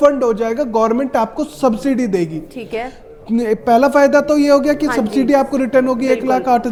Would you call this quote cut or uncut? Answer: uncut